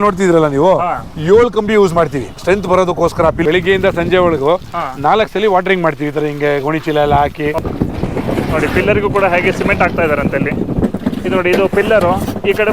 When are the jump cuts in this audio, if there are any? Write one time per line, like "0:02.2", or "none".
0:03.4
0:07.6